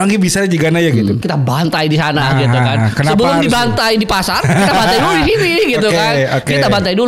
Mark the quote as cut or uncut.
cut